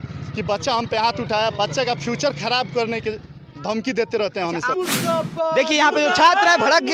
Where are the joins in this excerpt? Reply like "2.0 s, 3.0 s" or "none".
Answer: 4.7 s